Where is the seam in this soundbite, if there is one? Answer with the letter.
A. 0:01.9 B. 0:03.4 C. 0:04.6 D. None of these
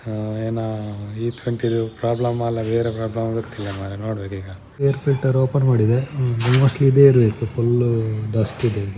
C